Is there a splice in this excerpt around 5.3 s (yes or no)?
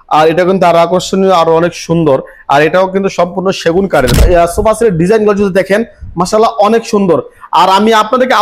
no